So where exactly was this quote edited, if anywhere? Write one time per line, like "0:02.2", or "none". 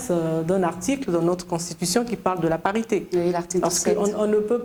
none